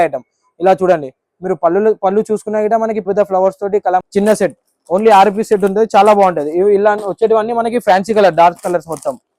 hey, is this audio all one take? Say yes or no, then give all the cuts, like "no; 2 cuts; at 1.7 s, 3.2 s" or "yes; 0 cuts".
no; 1 cut; at 4.0 s